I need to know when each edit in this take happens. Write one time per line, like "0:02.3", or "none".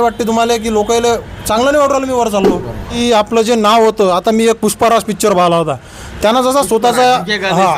0:02.9